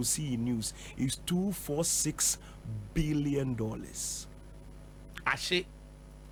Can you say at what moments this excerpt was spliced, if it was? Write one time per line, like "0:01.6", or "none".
none

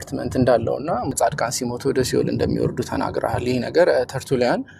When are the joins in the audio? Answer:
0:01.1

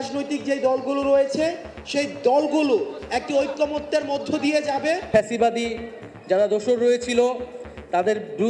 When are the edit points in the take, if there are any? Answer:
0:05.0

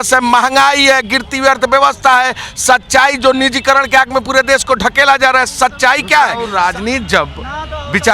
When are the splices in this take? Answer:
0:06.5

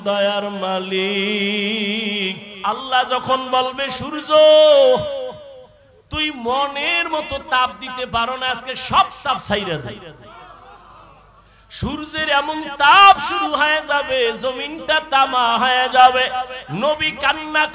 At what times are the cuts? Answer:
0:02.4

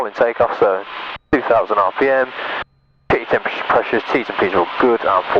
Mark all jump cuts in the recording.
none

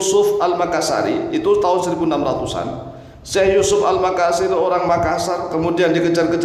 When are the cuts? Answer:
none

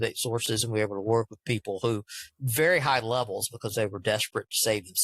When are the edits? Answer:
none

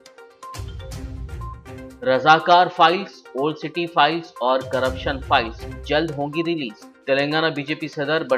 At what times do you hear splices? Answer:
0:01.2

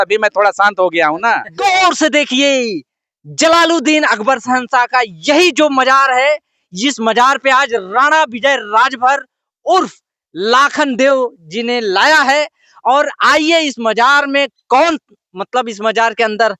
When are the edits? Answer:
0:01.5

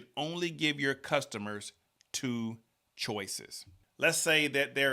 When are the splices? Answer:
0:03.7

